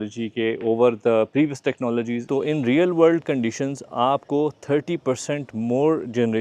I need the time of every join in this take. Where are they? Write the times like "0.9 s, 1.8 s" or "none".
2.2 s